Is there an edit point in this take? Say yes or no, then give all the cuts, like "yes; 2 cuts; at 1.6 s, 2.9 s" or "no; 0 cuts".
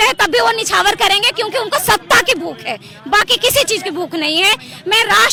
no; 0 cuts